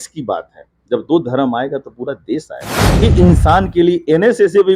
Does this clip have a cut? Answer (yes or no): yes